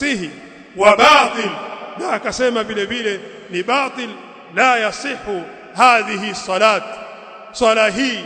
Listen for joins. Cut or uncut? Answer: uncut